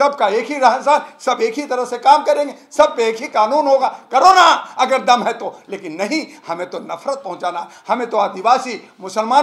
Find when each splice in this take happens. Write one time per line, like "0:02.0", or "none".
none